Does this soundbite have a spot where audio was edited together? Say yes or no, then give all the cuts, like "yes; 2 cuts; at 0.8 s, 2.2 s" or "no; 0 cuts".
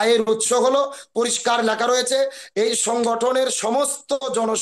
no; 0 cuts